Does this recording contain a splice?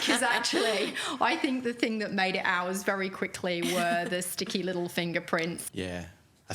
yes; 1 cut; at 5.6 s

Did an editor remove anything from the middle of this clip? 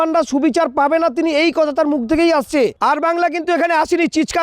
yes; 1 cut; at 2.8 s

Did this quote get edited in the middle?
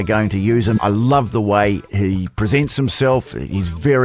yes; 2 cuts; at 0.8 s, 1.9 s

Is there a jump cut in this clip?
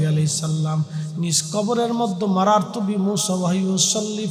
no; 0 cuts

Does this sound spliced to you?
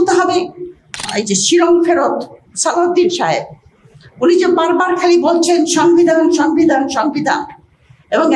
yes; 1 cut; at 1.1 s

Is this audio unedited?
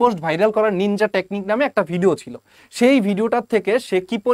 yes; 0 cuts

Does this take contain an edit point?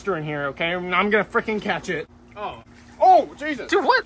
no; 0 cuts

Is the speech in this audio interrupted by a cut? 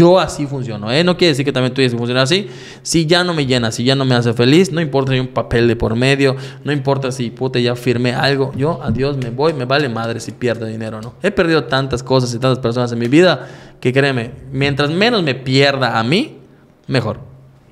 no; 0 cuts

